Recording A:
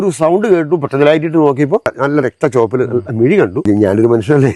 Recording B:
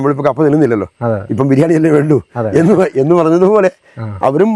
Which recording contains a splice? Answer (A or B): A